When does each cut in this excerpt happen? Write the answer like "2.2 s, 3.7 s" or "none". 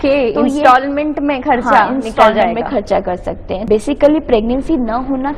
3.5 s